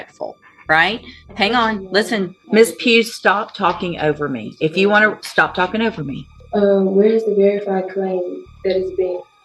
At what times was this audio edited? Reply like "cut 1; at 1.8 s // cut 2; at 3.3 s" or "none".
cut 1; at 2.4 s // cut 2; at 6.3 s